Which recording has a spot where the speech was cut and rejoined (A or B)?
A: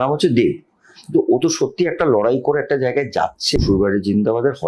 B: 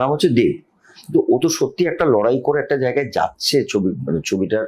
A